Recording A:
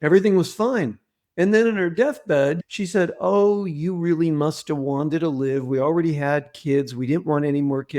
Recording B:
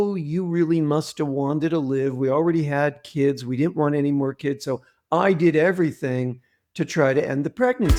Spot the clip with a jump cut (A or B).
A